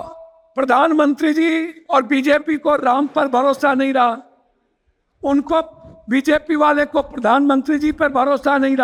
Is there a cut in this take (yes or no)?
no